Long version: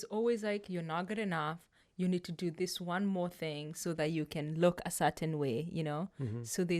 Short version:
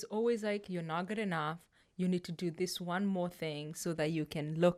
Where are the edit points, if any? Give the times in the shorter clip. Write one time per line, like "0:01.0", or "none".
none